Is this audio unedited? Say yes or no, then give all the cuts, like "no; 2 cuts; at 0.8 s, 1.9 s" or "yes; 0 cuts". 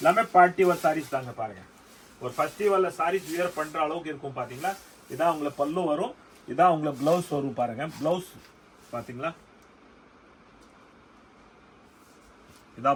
yes; 0 cuts